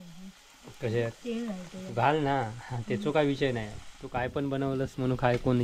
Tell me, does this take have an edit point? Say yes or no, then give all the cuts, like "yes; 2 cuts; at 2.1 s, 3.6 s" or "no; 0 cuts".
no; 0 cuts